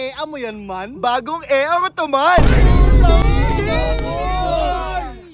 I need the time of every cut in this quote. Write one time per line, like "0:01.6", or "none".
none